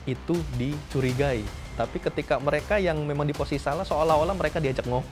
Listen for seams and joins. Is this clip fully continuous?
yes; 0 cuts

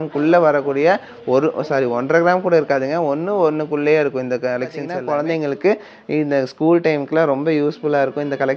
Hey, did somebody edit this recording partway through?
yes; 1 cut; at 4.8 s

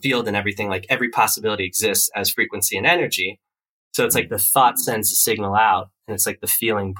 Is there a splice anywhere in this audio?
no; 0 cuts

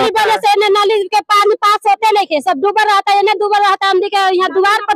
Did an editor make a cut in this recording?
no; 0 cuts

